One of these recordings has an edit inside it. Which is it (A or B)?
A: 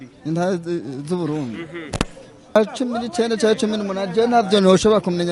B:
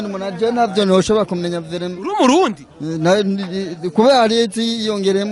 A